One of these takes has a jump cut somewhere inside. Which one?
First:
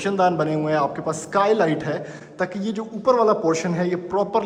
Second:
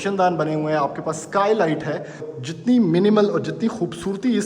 second; 1 cut; at 2.3 s

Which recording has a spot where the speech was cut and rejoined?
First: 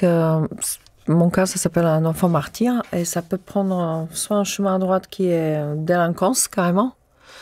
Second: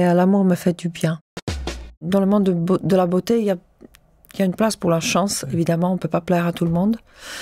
second; 1 cut; at 1.8 s

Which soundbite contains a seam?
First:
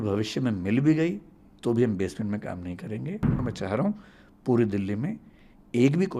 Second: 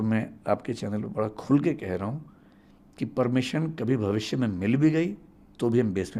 first; 1 cut; at 3.4 s

